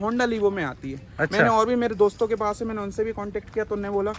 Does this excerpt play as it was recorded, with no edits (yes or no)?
yes